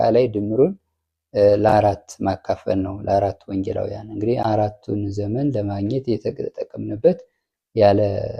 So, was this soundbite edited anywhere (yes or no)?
yes